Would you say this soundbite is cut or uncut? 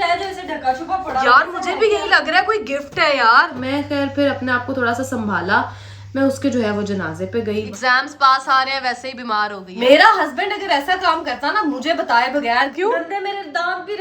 cut